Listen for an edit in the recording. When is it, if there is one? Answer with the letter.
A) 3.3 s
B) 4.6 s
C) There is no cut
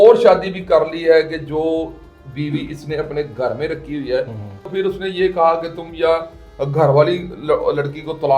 B